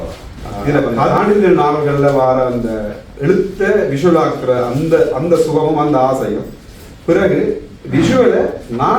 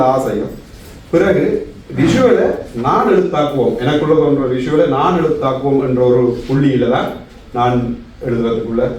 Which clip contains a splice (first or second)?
first